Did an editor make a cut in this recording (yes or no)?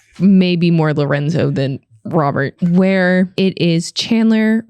yes